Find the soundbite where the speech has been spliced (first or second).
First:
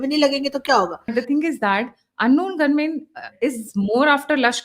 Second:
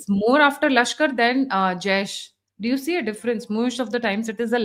first